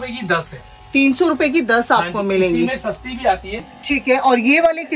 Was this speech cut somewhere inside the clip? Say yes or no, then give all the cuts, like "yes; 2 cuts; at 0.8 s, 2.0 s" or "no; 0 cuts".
yes; 1 cut; at 3.7 s